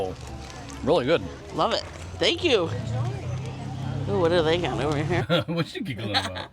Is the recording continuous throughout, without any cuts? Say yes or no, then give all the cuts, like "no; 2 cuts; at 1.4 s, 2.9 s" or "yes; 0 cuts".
no; 1 cut; at 5.2 s